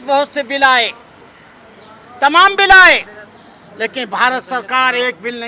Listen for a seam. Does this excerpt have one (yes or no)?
no